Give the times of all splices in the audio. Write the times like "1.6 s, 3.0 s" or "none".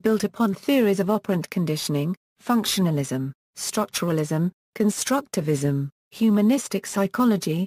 1.0 s